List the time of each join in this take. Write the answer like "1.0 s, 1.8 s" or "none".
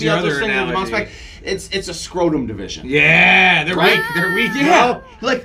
none